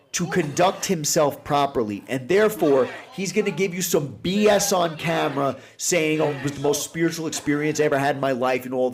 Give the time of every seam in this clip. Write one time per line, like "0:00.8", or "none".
0:06.3